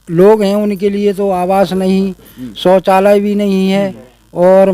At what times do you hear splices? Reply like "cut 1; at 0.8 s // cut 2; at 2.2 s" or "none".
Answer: none